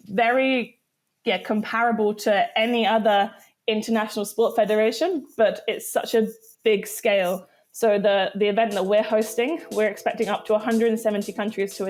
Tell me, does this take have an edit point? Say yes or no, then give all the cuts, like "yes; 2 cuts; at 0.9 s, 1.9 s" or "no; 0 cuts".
no; 0 cuts